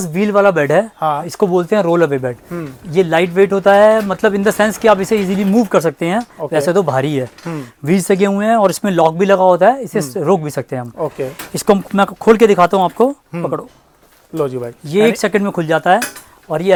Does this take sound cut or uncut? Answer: uncut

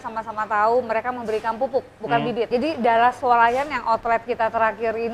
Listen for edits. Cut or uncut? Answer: cut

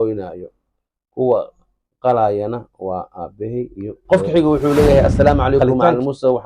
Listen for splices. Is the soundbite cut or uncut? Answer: cut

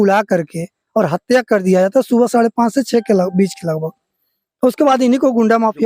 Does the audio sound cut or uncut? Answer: uncut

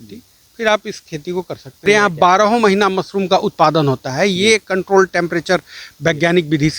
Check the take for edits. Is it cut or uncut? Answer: cut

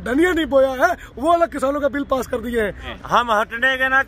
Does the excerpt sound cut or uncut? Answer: cut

